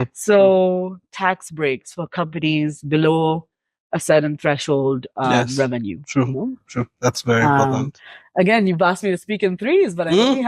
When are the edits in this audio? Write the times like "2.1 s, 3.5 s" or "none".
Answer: none